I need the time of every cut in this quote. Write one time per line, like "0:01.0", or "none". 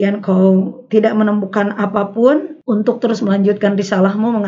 0:02.5